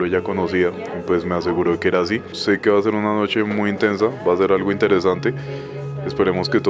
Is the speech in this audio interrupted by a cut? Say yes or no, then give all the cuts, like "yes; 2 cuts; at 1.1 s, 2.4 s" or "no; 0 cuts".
yes; 1 cut; at 2.3 s